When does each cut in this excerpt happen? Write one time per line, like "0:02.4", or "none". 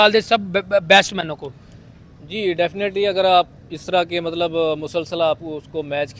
none